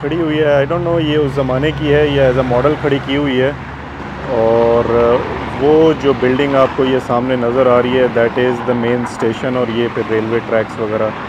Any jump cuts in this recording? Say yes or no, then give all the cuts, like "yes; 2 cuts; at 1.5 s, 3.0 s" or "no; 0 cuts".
no; 0 cuts